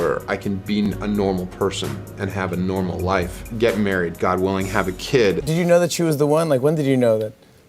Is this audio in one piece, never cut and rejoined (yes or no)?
no